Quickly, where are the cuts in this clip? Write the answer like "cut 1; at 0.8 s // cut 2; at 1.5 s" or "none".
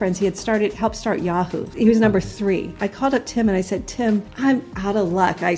cut 1; at 1.6 s // cut 2; at 2.8 s // cut 3; at 4.3 s